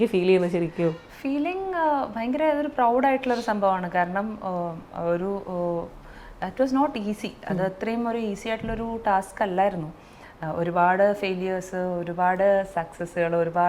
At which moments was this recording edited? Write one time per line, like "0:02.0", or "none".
none